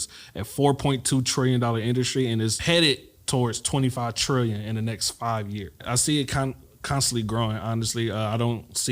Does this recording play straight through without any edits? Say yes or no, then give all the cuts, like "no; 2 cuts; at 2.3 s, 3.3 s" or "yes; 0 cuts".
no; 2 cuts; at 2.6 s, 5.8 s